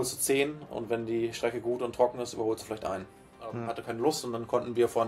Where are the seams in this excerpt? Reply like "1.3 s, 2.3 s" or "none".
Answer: 3.7 s